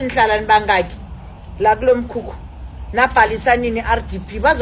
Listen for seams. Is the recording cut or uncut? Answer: uncut